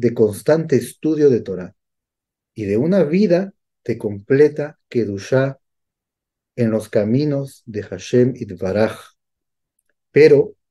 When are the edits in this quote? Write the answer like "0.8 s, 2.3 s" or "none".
none